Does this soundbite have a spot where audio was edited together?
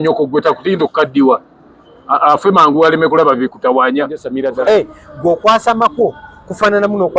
yes; 1 cut; at 4.2 s

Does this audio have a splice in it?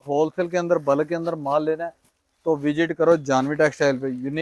no; 0 cuts

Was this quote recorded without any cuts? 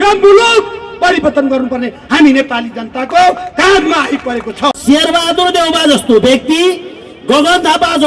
no; 1 cut; at 4.8 s

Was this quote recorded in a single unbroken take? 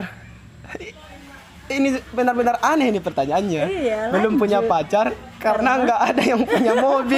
yes; 0 cuts

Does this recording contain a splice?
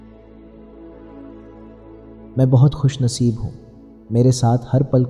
no; 0 cuts

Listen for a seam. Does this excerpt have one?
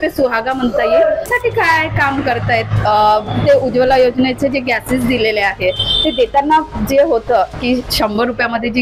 yes; 1 cut; at 1.3 s

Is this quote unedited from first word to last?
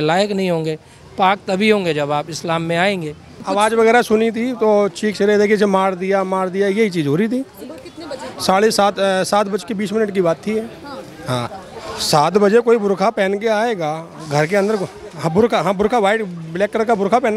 no; 2 cuts; at 3.4 s, 11.6 s

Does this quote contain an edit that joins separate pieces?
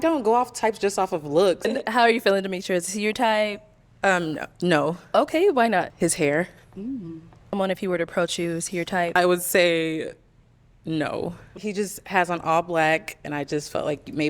yes; 5 cuts; at 1.7 s, 5.9 s, 7.6 s, 9.2 s, 11.5 s

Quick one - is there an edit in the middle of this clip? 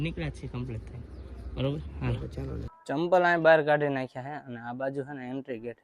yes; 1 cut; at 2.7 s

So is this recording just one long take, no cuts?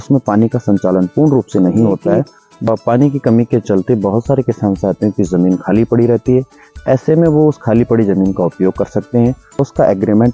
no; 2 cuts; at 2.6 s, 9.6 s

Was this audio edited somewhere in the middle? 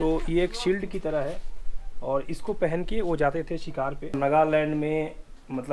yes; 1 cut; at 4.2 s

